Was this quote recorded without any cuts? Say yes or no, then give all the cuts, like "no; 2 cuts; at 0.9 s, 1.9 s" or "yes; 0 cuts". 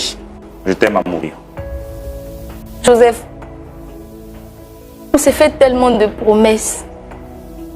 no; 3 cuts; at 1.4 s, 2.8 s, 6.7 s